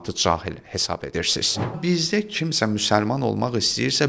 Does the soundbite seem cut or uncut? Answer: cut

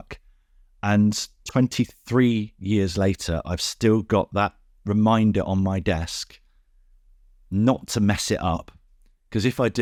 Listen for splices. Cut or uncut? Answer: uncut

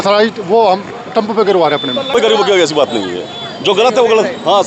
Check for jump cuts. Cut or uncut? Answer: cut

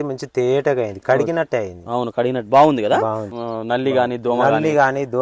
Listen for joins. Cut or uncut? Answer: cut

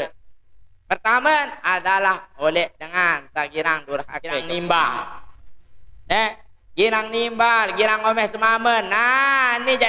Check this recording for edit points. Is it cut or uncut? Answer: cut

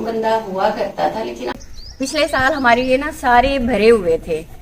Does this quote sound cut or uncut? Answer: cut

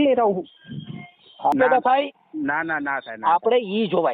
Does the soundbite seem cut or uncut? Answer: cut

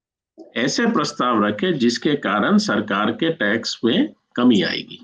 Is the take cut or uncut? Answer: uncut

